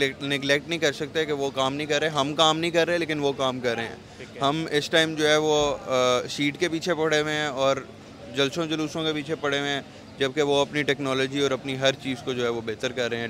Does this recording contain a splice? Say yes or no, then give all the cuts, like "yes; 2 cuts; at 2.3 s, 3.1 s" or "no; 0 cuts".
no; 0 cuts